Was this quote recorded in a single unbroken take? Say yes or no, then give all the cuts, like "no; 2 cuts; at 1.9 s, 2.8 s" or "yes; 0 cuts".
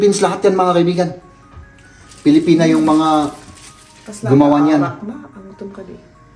yes; 0 cuts